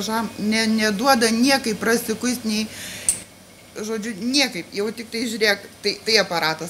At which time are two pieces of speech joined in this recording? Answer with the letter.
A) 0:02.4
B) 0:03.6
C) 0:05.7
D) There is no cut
D